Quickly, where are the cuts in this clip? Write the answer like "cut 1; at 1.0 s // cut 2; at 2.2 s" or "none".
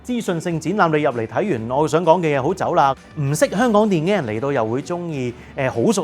cut 1; at 3.1 s